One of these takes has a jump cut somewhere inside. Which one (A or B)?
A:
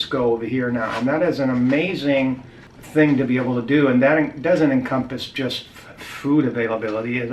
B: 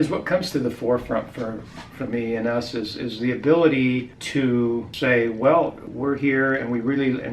B